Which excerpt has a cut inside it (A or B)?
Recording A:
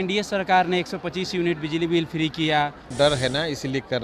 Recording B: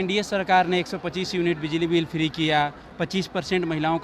A